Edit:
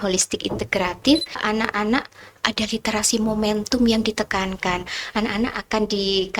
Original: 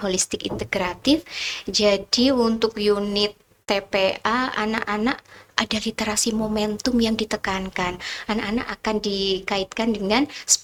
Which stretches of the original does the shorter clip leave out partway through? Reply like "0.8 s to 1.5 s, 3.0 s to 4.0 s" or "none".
1.4 s to 4.5 s